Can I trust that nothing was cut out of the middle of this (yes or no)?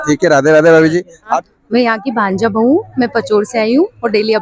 no